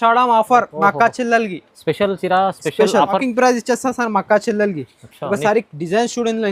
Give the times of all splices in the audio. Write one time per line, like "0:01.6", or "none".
0:03.2